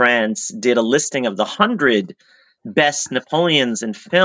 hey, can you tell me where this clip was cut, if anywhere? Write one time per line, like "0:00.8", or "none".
none